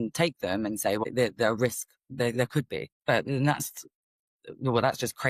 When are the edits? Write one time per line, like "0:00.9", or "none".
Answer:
0:01.0
0:02.9